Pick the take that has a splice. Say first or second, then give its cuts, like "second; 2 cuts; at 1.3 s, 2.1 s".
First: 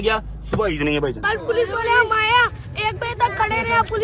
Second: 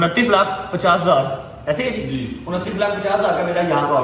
first; 1 cut; at 1.2 s